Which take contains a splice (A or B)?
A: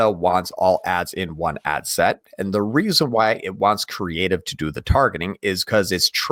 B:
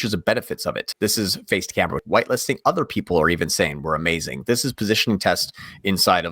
B